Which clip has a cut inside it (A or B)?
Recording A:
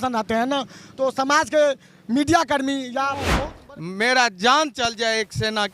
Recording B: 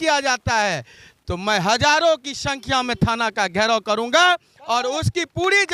A